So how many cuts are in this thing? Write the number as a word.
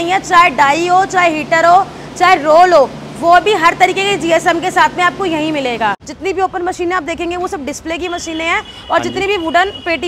one